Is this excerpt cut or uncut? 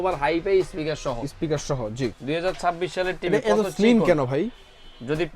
cut